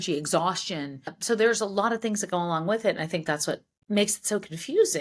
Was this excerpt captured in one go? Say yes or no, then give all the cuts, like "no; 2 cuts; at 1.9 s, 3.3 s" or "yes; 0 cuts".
no; 2 cuts; at 1.2 s, 3.7 s